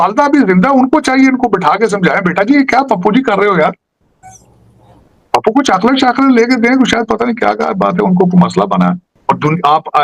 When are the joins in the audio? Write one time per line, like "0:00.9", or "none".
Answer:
0:09.1